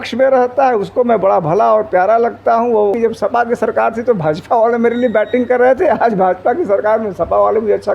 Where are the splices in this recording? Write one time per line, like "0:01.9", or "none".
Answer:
0:02.9